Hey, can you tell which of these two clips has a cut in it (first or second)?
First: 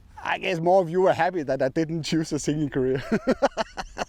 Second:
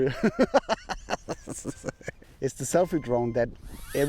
second